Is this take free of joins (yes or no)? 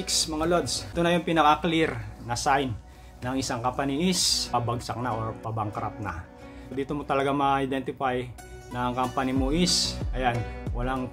no